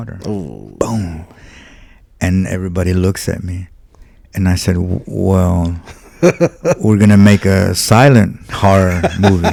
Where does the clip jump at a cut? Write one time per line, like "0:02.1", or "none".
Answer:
none

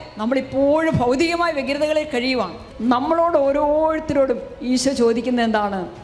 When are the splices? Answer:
0:02.7

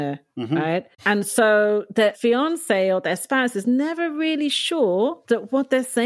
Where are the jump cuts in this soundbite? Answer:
0:00.9
0:02.2
0:05.2

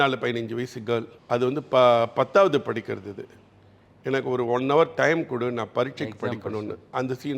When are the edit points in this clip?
0:01.1

